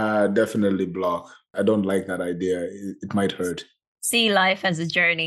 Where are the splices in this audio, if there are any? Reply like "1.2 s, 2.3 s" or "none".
1.5 s